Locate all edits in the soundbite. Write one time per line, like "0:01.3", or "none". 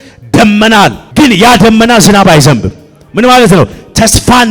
0:01.0